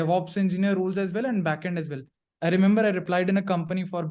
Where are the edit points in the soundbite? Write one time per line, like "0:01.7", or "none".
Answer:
0:03.1